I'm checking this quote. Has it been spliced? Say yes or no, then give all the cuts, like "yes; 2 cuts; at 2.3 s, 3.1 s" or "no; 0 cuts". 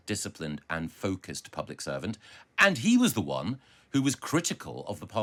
no; 0 cuts